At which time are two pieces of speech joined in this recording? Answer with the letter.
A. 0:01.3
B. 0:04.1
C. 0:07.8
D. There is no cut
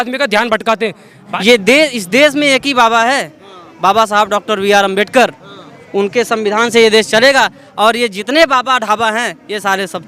A